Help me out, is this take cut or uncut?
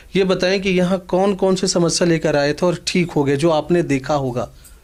uncut